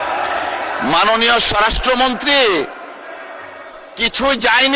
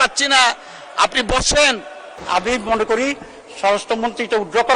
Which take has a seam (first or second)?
second